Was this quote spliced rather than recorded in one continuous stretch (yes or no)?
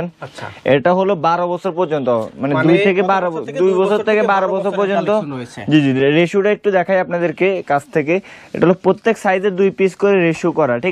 no